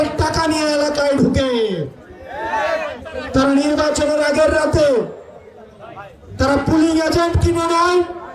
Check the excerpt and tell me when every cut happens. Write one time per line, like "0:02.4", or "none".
none